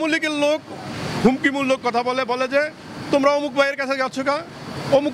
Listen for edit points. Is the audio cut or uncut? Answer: uncut